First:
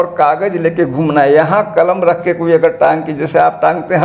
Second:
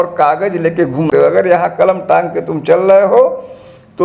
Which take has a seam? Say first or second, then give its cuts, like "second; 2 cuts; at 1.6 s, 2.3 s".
second; 1 cut; at 1.1 s